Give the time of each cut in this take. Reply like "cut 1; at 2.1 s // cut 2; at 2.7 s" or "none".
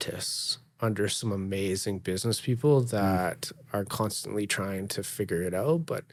none